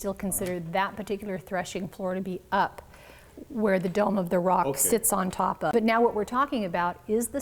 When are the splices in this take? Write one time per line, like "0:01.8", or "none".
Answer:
0:05.7